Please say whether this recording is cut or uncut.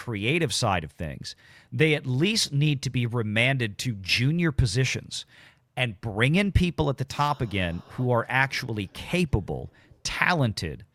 uncut